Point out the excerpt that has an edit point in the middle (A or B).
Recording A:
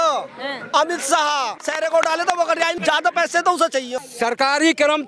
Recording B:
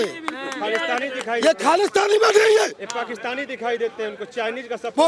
A